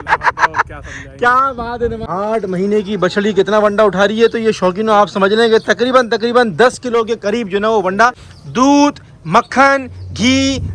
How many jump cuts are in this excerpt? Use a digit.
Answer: 2